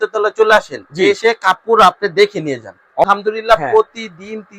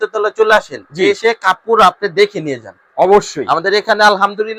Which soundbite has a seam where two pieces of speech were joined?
first; 1 cut; at 3.0 s

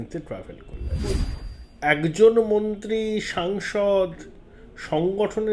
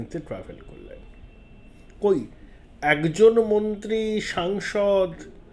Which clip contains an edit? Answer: first; 1 cut; at 1.1 s

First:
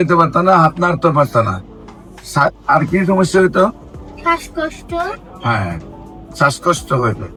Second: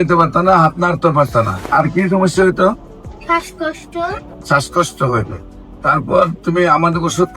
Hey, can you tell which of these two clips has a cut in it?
second; 2 cuts; at 1.6 s, 4.3 s

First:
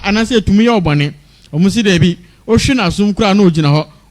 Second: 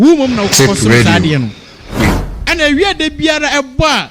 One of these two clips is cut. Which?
second; 1 cut; at 2.2 s

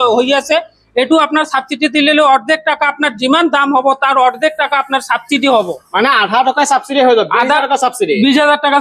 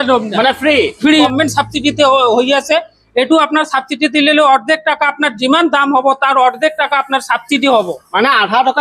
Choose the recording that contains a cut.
second; 1 cut; at 1.3 s

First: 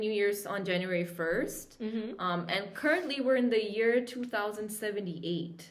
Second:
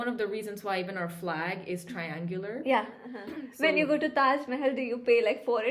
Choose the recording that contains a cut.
second; 1 cut; at 3.1 s

